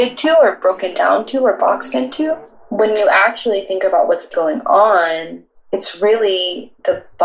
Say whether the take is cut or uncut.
cut